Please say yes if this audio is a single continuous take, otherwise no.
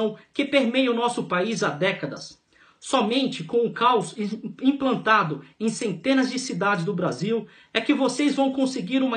yes